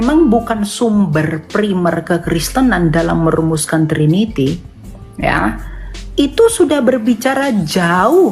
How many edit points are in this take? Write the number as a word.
zero